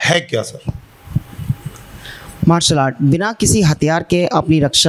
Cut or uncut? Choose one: uncut